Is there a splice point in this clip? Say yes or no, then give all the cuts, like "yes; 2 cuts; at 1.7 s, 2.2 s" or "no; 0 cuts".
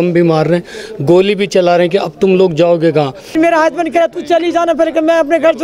yes; 1 cut; at 3.4 s